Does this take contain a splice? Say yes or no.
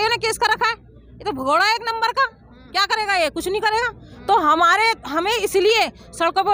no